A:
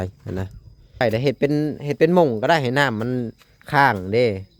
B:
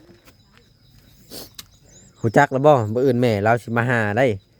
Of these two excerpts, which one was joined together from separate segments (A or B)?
A